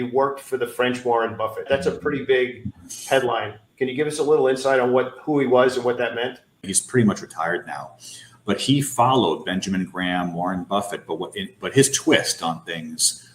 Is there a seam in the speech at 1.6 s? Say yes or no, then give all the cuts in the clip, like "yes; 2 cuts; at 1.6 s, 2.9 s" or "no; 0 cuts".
yes; 2 cuts; at 1.6 s, 6.5 s